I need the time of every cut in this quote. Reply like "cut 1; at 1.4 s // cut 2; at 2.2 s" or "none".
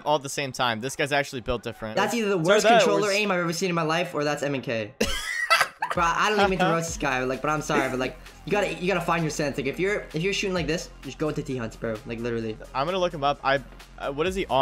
cut 1; at 1.9 s // cut 2; at 12.7 s